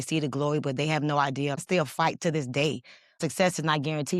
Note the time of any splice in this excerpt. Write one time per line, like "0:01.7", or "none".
0:01.6
0:03.2